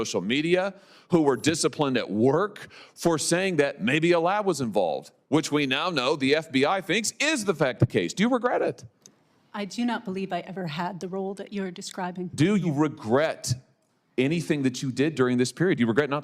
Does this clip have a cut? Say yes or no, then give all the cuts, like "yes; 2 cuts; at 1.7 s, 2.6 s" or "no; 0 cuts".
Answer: yes; 1 cut; at 5.1 s